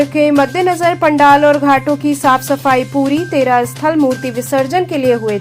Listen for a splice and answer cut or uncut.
uncut